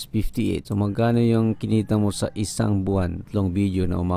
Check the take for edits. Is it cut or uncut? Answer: cut